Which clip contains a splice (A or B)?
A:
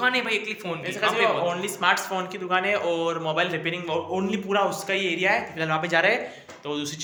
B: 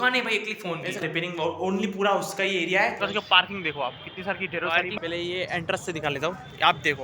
B